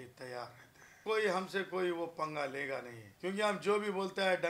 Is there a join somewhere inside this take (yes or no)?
yes